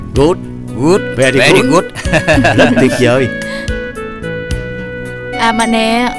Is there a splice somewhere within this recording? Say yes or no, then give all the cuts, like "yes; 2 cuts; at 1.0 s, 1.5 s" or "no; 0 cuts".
no; 0 cuts